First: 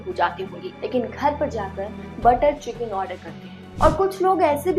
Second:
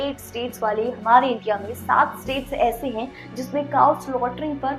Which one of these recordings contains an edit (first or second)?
first